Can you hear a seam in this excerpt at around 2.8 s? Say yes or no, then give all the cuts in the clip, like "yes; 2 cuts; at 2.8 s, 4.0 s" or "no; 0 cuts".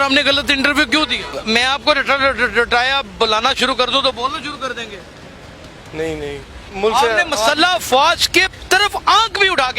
no; 2 cuts; at 1.3 s, 6.6 s